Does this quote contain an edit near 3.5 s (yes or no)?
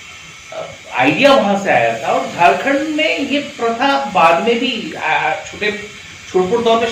no